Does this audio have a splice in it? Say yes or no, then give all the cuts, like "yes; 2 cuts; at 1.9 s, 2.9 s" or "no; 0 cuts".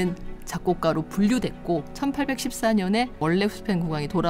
yes; 2 cuts; at 1.9 s, 3.1 s